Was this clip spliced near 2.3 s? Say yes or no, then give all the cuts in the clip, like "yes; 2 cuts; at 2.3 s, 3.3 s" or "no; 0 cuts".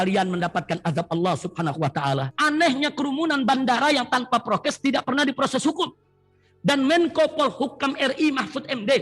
yes; 1 cut; at 2.3 s